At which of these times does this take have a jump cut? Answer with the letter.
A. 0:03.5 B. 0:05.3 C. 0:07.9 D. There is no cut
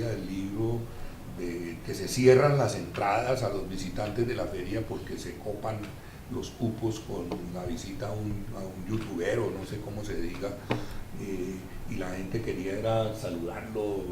A